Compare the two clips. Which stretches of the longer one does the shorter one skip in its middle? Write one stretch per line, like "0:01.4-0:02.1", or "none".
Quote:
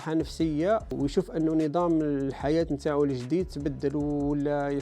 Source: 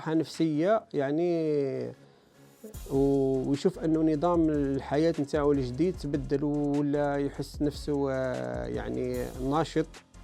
0:00.9-0:03.4